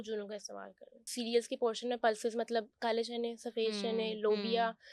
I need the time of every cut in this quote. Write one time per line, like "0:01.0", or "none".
0:01.1